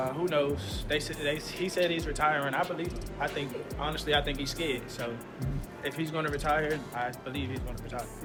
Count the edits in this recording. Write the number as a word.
zero